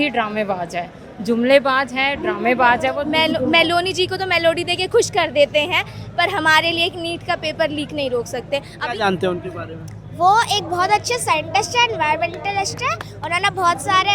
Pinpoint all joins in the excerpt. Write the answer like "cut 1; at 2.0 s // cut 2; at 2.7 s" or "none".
cut 1; at 3.0 s // cut 2; at 8.7 s